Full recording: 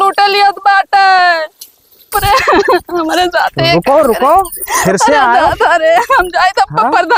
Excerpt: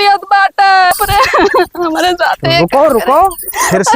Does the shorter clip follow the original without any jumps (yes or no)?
no